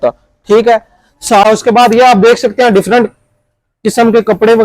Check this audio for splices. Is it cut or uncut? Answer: cut